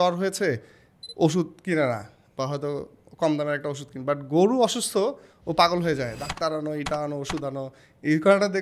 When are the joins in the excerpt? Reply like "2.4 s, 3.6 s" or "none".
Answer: none